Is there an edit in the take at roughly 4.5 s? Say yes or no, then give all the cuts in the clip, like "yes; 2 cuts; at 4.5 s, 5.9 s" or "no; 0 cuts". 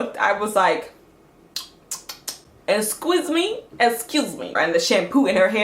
yes; 1 cut; at 4.5 s